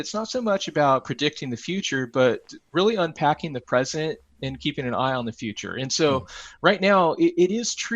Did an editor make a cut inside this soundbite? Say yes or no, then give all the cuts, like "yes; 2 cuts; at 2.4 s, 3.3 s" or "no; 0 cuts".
no; 0 cuts